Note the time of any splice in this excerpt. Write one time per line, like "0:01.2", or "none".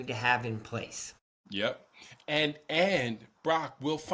none